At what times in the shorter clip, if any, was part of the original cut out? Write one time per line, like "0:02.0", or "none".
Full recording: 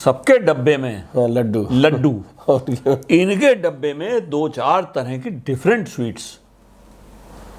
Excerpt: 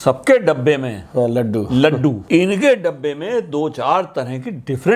0:02.2